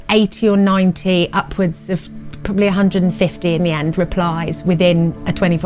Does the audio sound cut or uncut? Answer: uncut